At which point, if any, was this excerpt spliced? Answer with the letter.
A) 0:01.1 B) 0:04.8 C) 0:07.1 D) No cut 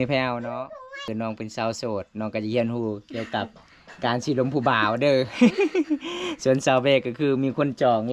A